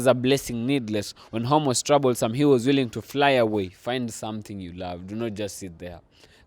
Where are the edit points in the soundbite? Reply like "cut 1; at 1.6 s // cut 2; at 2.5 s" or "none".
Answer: cut 1; at 3.8 s